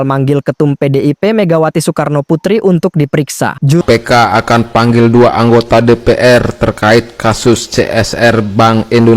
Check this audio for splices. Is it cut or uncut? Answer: cut